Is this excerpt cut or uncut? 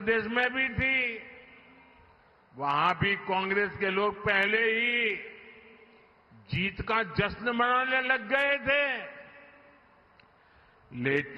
uncut